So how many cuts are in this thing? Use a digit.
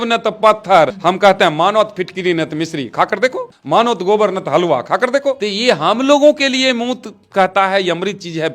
3